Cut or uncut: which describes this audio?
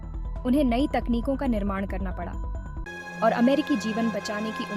cut